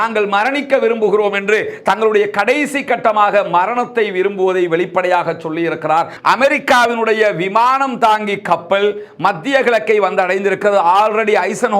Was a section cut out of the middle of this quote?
yes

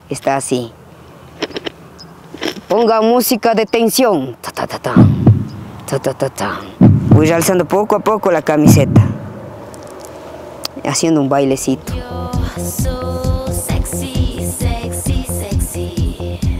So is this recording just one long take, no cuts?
yes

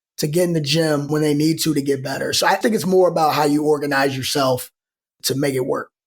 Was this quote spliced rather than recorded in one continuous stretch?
yes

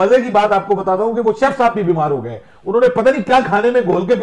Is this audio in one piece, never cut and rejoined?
yes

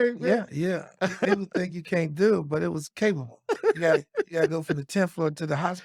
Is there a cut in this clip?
no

